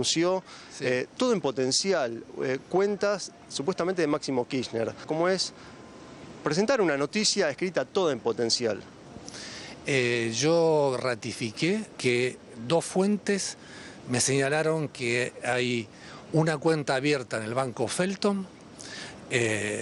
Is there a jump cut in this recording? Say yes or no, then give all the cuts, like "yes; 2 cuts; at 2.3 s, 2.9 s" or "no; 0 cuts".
no; 0 cuts